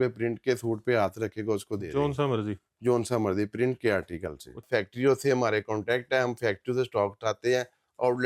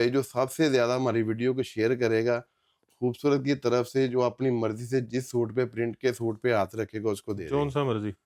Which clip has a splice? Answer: first; 1 cut; at 4.6 s

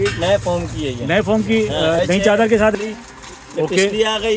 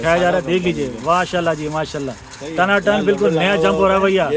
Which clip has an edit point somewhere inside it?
first; 1 cut; at 2.7 s

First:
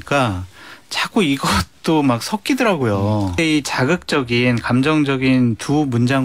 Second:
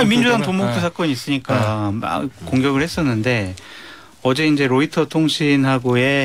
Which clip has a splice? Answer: first; 1 cut; at 3.4 s

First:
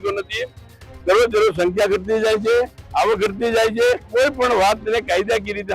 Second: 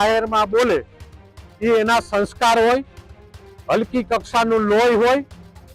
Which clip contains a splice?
first; 1 cut; at 4.1 s

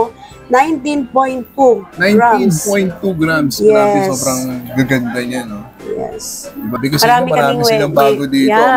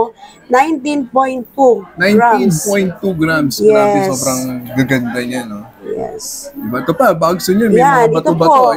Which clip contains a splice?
first; 1 cut; at 6.8 s

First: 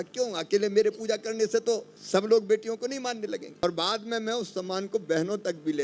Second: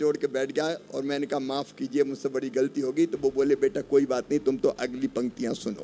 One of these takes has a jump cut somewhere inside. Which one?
first; 2 cuts; at 1.9 s, 3.6 s

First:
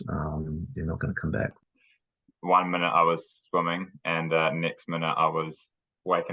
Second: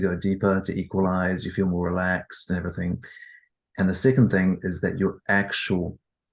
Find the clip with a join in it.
first; 1 cut; at 1.6 s

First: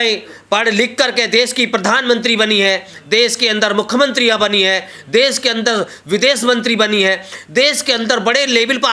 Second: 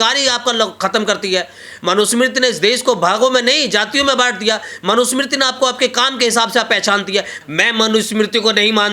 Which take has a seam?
second; 1 cut; at 7.4 s

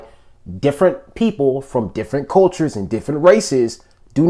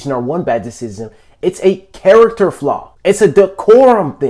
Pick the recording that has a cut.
second; 1 cut; at 2.9 s

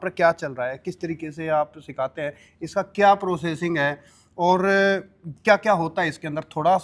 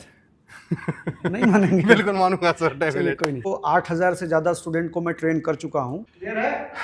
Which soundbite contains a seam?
second; 2 cuts; at 3.5 s, 6.0 s

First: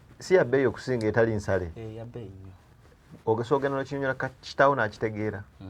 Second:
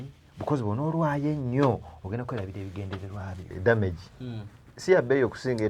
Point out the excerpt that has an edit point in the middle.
second; 1 cut; at 3.5 s

